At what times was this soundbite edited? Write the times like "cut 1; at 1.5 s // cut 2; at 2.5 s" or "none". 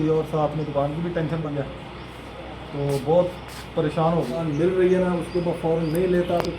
cut 1; at 1.5 s // cut 2; at 4.4 s